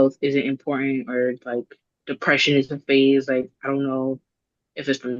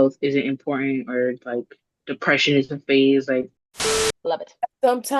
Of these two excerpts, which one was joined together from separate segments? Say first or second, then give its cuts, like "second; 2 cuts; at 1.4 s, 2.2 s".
second; 1 cut; at 3.7 s